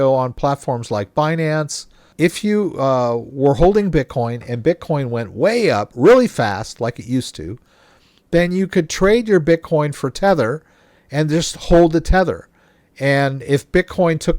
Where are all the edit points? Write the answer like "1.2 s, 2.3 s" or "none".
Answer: 2.0 s